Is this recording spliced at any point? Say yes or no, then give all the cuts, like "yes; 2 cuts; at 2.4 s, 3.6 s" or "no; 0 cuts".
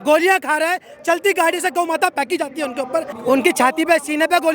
yes; 1 cut; at 3.1 s